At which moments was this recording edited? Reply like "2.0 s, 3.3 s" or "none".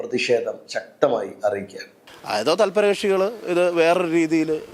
1.9 s